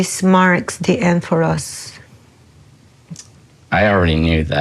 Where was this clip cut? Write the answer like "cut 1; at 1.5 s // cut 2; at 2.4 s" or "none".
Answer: none